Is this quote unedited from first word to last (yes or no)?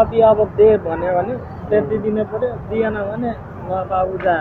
yes